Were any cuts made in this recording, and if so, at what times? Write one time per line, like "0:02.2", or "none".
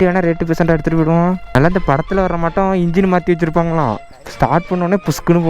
0:01.4

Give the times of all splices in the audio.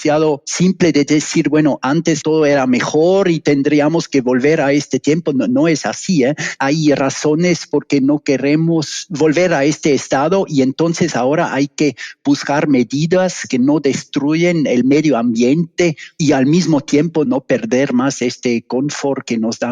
none

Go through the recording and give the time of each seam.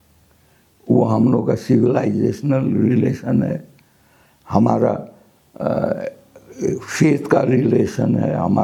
none

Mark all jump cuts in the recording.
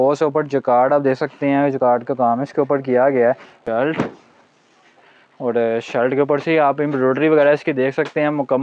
0:03.5

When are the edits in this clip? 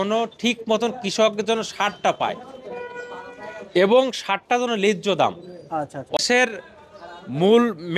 0:06.2

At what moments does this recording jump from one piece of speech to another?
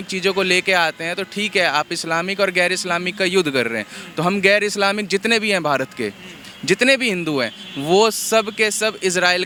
none

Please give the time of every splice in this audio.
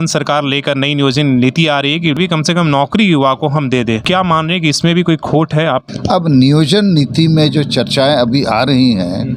0:02.2
0:04.0
0:05.9

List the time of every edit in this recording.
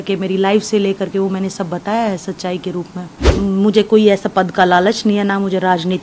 0:03.3

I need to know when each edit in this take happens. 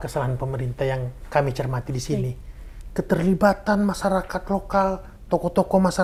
none

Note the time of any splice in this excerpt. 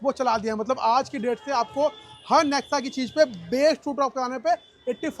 none

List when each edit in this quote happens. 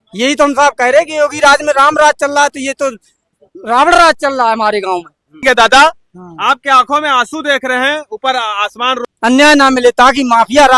0:05.4
0:09.0

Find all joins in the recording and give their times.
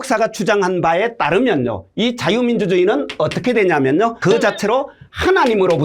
none

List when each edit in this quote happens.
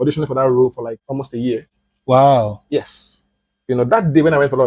0:01.0

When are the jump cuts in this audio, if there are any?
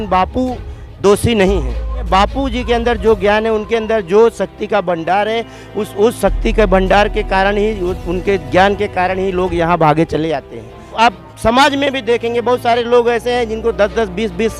0:02.0
0:10.9

